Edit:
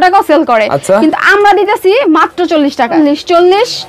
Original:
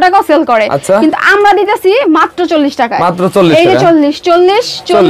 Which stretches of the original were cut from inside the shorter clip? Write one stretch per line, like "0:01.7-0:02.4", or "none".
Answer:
0:02.9-0:03.9